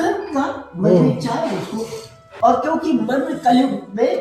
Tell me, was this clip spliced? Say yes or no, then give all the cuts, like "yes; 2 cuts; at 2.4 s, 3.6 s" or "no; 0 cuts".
yes; 1 cut; at 2.2 s